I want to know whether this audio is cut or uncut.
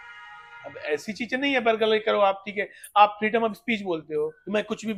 uncut